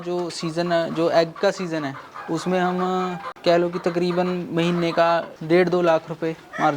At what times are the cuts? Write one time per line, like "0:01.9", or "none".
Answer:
0:03.3
0:05.3